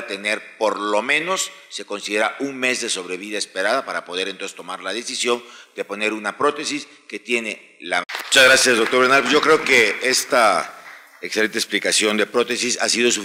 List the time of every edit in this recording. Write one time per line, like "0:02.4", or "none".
none

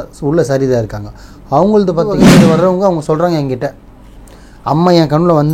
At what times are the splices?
0:02.4

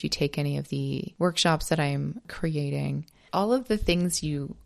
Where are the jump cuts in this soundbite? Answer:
0:01.1
0:02.3
0:03.2

